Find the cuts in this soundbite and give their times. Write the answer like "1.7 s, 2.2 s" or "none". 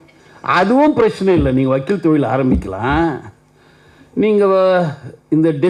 none